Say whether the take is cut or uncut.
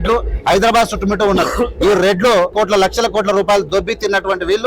cut